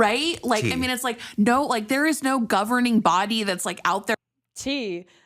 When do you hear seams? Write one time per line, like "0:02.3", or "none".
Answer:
none